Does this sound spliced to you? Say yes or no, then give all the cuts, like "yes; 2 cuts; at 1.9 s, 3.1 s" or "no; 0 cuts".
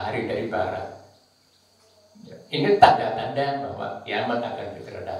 no; 0 cuts